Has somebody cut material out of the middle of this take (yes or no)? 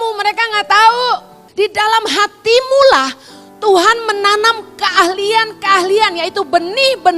yes